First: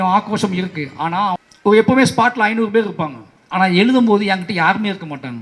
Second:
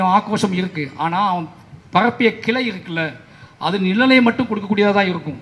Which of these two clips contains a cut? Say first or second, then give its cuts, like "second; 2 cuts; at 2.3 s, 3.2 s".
first; 1 cut; at 1.5 s